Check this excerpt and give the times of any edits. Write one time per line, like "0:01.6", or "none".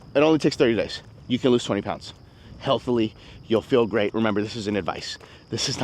none